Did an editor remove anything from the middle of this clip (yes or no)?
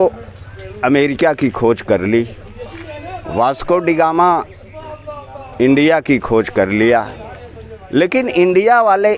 no